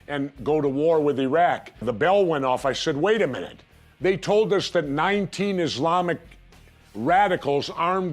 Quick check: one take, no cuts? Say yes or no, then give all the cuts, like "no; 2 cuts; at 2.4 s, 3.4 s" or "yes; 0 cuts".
no; 1 cut; at 3.3 s